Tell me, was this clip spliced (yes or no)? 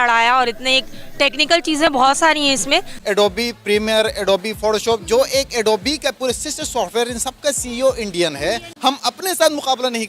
yes